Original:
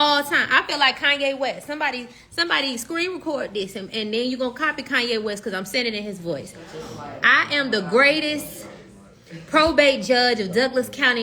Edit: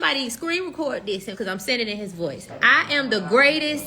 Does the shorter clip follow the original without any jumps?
no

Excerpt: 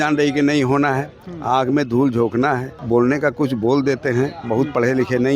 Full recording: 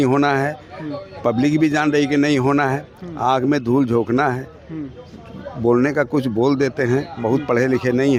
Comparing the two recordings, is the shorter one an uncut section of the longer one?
no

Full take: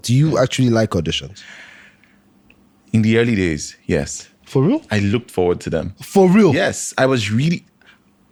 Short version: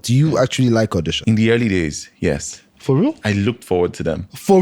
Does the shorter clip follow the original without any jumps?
no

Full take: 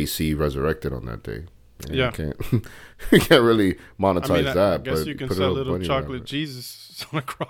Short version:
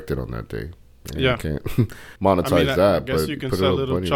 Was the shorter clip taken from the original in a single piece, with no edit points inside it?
no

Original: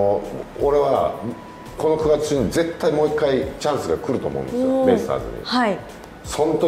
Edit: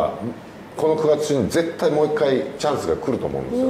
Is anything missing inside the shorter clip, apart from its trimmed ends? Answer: no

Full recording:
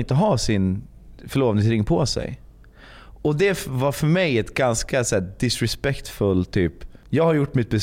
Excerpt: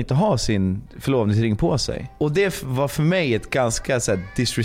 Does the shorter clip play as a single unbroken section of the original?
no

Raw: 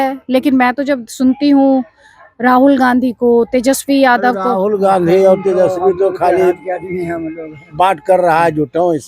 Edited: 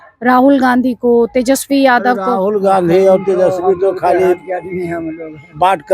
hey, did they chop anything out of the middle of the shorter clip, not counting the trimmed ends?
no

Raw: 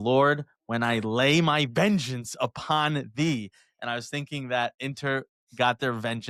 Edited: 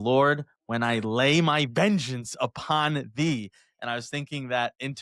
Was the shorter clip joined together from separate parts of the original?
no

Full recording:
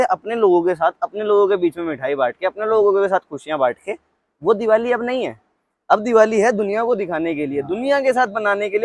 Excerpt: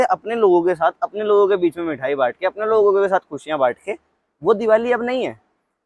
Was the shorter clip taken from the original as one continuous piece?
yes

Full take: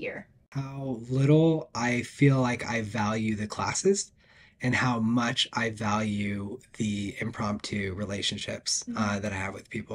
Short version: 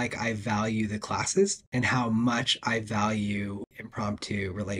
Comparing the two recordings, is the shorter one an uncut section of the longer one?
no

